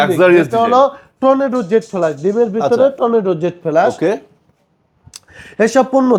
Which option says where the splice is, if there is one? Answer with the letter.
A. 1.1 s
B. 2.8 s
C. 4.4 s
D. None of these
D